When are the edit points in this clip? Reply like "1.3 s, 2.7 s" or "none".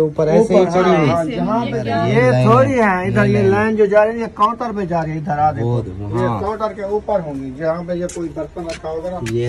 1.8 s